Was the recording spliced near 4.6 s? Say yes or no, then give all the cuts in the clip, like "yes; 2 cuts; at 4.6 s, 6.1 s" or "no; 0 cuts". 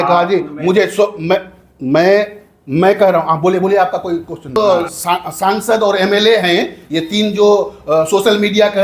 yes; 1 cut; at 4.6 s